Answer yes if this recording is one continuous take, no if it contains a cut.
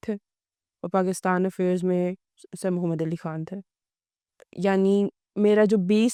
yes